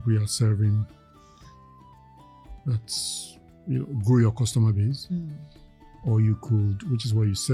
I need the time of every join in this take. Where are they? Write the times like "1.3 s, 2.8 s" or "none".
none